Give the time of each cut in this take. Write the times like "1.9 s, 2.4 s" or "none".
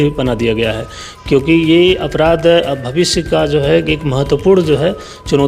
none